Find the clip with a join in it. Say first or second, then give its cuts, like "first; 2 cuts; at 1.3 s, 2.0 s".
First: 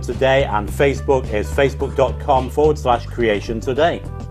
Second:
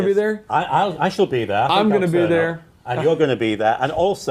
second; 1 cut; at 1.3 s